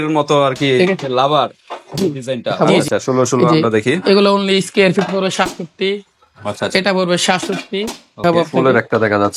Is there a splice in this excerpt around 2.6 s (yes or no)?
yes